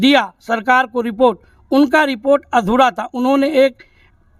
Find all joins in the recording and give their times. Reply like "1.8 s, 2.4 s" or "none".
none